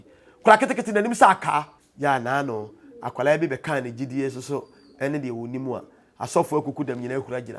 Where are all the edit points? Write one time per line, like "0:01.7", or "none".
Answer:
0:01.8

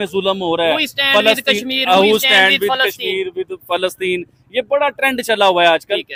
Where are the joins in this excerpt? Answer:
none

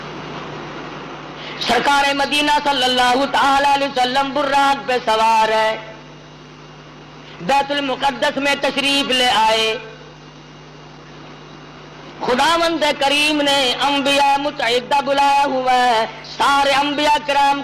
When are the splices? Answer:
none

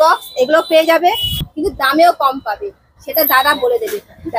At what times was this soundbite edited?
0:01.5

